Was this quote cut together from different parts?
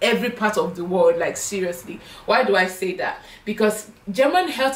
no; 0 cuts

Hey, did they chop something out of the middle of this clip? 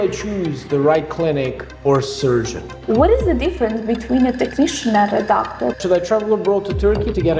yes; 2 cuts; at 2.7 s, 5.8 s

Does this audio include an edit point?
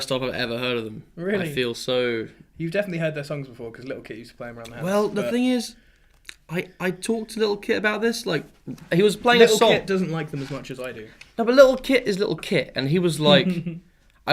yes; 1 cut; at 4.8 s

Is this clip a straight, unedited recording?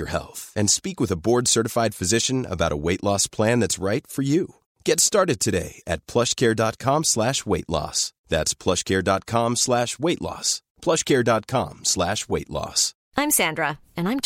yes; 0 cuts

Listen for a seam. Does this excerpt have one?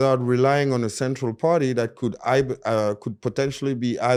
no; 0 cuts

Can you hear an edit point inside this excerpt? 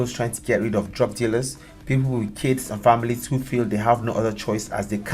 no; 0 cuts

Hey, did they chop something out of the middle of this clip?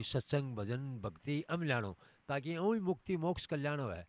no; 0 cuts

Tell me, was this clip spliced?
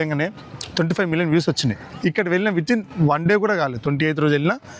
yes; 1 cut; at 1.8 s

